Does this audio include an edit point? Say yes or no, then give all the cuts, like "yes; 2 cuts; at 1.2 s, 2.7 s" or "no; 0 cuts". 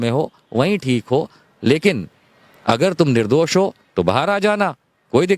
no; 0 cuts